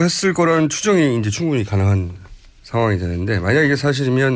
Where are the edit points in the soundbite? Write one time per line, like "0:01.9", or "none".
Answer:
none